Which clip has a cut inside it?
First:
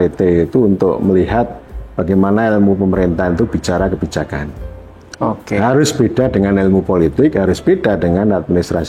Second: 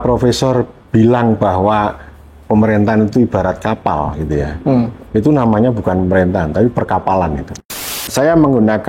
second; 1 cut; at 8.0 s

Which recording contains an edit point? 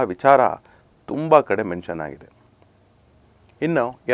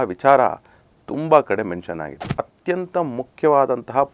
second; 1 cut; at 2.2 s

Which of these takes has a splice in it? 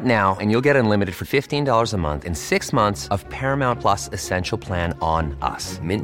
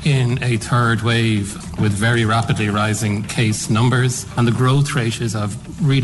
second; 2 cuts; at 1.7 s, 4.3 s

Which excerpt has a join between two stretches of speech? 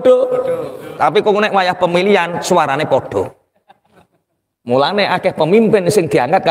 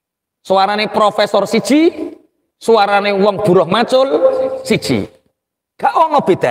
first; 1 cut; at 0.9 s

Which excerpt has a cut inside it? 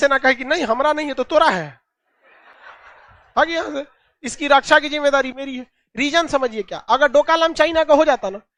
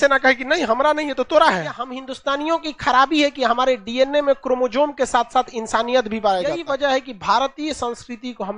second; 2 cuts; at 2.1 s, 6.6 s

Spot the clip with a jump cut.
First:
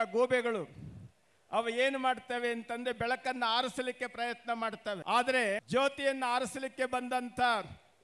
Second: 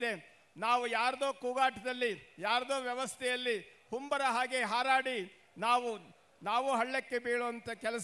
first; 2 cuts; at 5.0 s, 5.6 s

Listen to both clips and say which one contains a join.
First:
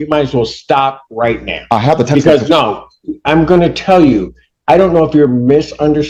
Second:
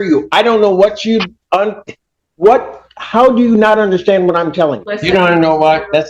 second; 1 cut; at 4.9 s

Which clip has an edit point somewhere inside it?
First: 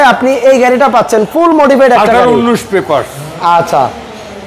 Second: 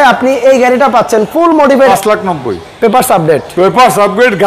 second; 1 cut; at 1.9 s

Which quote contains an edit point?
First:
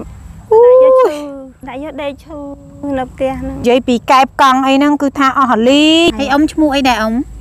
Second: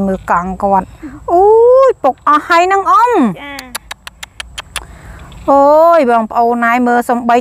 first; 3 cuts; at 1.5 s, 3.6 s, 6.1 s

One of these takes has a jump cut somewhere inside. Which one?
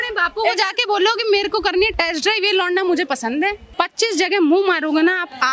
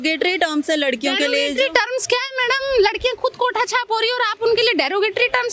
first; 1 cut; at 3.6 s

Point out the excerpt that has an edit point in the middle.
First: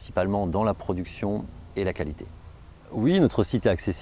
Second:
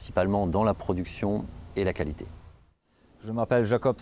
second; 1 cut; at 2.9 s

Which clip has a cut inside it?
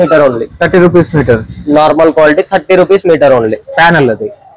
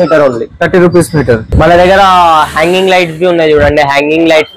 second; 1 cut; at 1.5 s

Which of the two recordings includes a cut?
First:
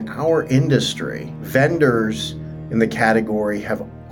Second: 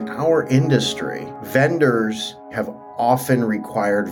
second; 1 cut; at 2.6 s

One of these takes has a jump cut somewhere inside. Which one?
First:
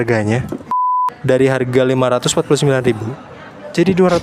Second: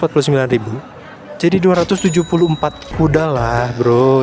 first; 1 cut; at 1.0 s

